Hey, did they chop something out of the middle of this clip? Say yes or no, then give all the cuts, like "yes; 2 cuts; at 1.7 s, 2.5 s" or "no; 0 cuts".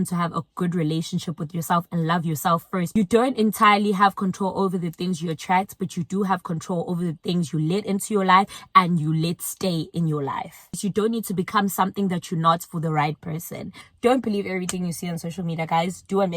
yes; 3 cuts; at 2.9 s, 10.7 s, 13.8 s